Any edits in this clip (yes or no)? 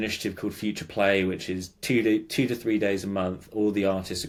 no